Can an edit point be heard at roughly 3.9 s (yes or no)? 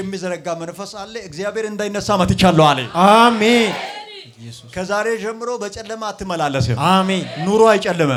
no